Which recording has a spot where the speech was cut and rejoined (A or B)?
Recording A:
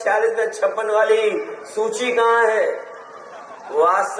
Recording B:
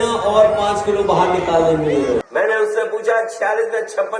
B